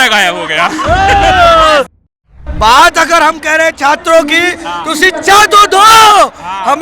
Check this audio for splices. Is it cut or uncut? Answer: cut